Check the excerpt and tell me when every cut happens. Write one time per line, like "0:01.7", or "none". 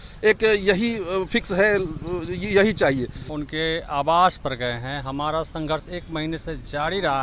0:03.2